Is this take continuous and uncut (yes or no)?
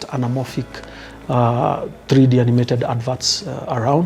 yes